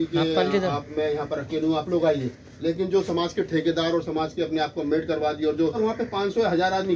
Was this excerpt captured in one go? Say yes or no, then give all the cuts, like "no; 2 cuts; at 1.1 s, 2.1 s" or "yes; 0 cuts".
no; 1 cut; at 5.8 s